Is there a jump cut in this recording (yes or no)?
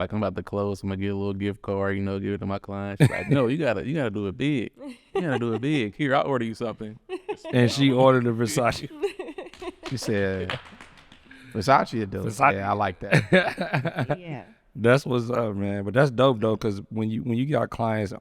no